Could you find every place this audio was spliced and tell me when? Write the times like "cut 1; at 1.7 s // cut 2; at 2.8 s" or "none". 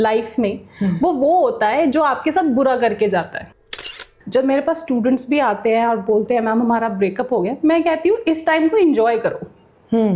cut 1; at 3.8 s